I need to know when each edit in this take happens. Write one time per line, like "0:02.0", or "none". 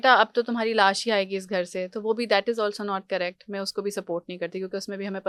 none